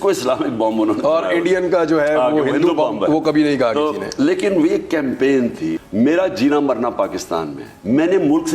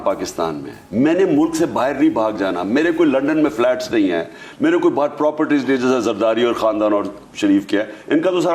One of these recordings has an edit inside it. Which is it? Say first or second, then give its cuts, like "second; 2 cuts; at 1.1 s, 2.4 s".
first; 1 cut; at 5.8 s